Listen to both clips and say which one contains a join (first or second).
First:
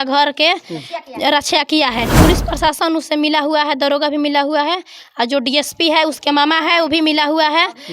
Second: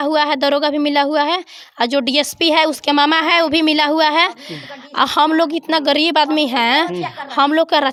first